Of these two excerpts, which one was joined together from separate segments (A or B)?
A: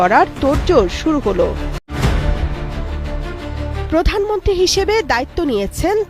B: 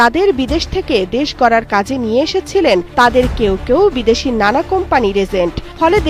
A